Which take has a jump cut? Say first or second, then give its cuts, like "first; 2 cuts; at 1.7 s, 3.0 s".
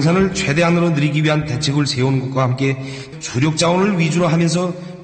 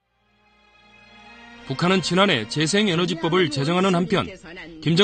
second; 1 cut; at 3.2 s